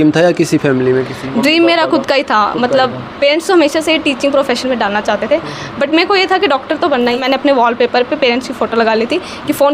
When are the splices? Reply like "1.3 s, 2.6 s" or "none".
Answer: 7.2 s